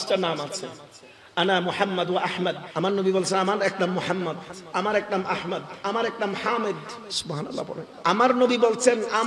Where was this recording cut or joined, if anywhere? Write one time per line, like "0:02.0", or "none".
0:02.6
0:07.9